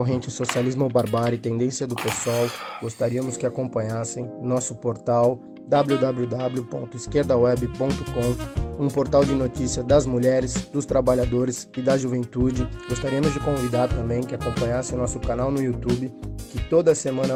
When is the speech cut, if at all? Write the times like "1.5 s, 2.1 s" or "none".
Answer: none